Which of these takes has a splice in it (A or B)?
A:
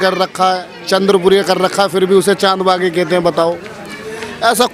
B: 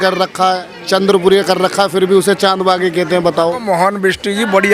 B